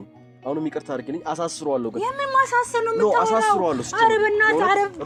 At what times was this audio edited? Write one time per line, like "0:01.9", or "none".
none